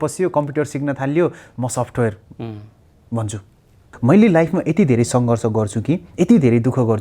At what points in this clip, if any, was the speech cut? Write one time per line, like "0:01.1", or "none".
0:03.9